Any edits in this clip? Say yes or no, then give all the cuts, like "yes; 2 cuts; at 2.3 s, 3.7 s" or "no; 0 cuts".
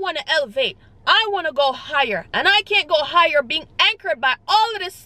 no; 0 cuts